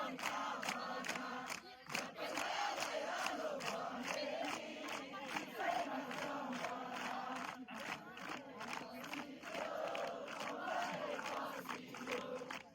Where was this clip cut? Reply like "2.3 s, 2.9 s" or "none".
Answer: none